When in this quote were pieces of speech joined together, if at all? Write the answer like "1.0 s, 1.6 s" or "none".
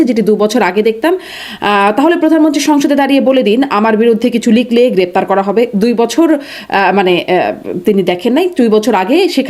none